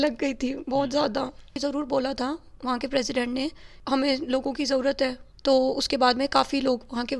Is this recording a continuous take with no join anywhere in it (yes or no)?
no